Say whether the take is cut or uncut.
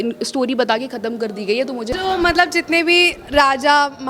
cut